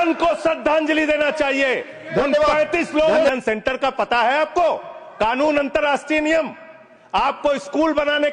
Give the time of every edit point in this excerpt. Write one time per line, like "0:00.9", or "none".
0:03.3